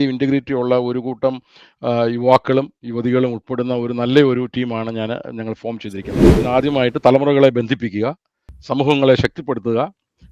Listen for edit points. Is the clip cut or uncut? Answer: cut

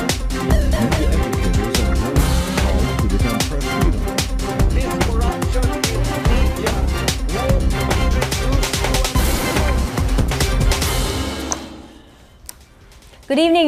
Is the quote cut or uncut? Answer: uncut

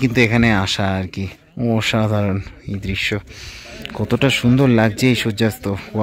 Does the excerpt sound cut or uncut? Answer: uncut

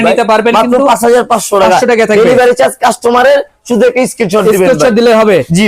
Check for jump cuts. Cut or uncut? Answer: uncut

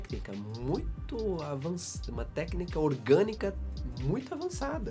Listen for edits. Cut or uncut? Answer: uncut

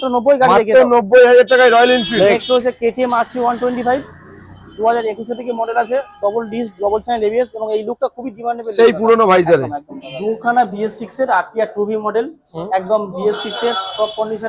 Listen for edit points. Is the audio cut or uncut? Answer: cut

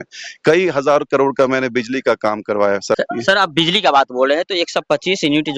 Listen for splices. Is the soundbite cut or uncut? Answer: cut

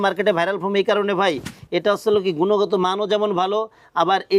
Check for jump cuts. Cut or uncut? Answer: uncut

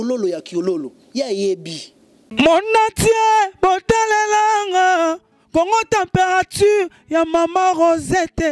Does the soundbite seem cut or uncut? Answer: cut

